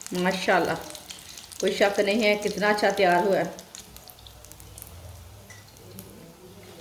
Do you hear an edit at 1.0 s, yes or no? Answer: no